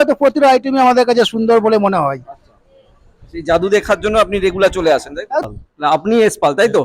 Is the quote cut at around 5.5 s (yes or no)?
yes